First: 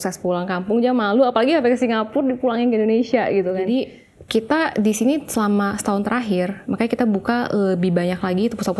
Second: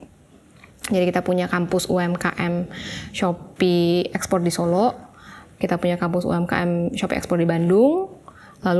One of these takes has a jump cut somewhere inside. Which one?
first; 1 cut; at 3.6 s

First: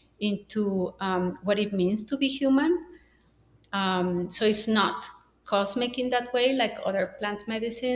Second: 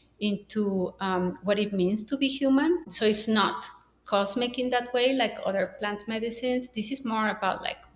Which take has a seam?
second; 1 cut; at 2.9 s

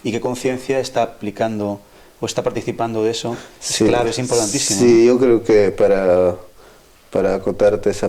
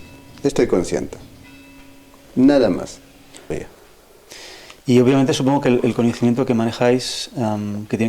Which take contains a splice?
second; 1 cut; at 3.5 s

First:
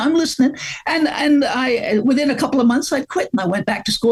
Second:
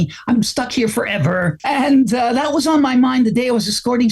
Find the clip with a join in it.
second; 1 cut; at 1.6 s

